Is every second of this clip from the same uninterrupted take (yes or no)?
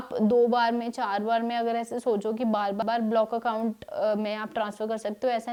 yes